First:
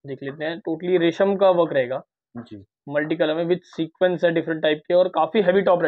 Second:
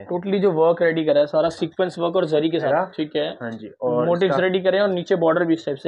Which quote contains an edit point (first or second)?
second